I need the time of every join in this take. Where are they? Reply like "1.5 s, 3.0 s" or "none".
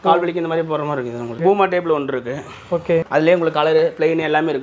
1.4 s, 3.1 s